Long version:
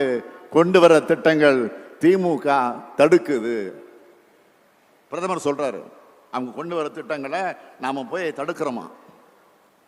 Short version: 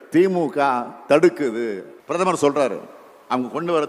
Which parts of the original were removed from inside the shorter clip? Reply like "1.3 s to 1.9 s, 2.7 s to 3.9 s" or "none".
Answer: 3.8 s to 4.9 s